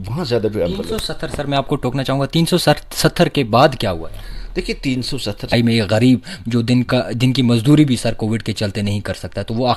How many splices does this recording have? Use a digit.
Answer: 1